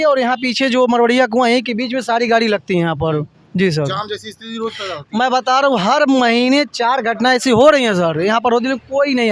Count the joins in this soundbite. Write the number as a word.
zero